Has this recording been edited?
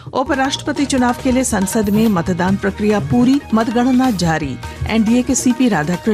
yes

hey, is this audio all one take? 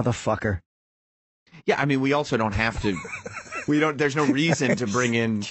yes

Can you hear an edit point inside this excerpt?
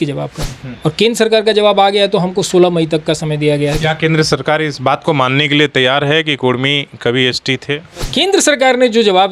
yes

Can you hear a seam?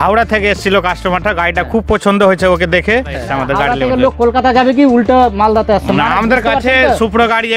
yes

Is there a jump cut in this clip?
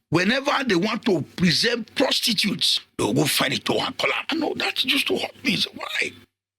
yes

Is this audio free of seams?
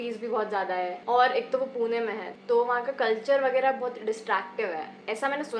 yes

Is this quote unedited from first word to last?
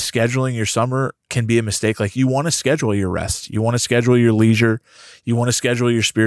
no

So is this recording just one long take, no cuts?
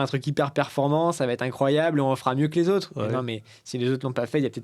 yes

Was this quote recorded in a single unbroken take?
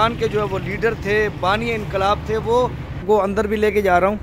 no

